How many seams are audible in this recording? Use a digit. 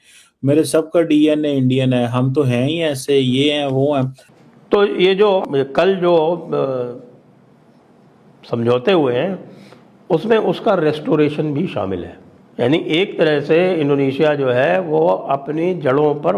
2